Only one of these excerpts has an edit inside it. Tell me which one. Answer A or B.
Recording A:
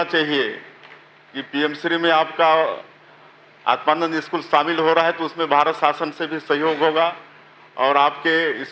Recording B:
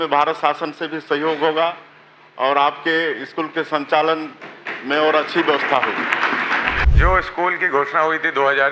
B